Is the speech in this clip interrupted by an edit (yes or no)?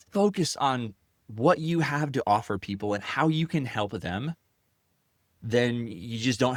no